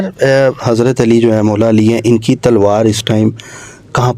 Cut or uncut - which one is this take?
uncut